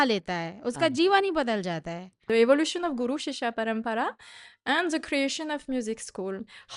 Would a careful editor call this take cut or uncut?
cut